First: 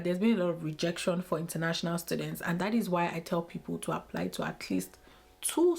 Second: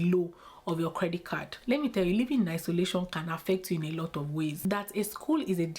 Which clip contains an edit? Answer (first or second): second